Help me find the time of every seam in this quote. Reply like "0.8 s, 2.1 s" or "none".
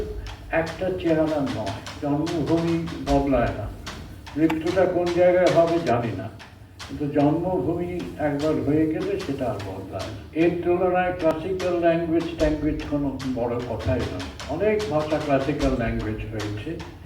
2.0 s, 10.2 s